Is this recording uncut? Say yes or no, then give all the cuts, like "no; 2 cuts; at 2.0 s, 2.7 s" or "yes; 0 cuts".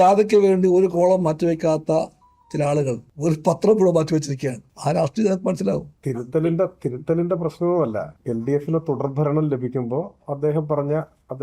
no; 4 cuts; at 3.1 s, 4.7 s, 5.9 s, 8.1 s